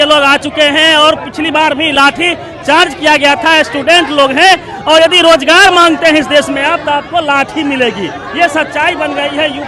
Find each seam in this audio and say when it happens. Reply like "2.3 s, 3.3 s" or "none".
none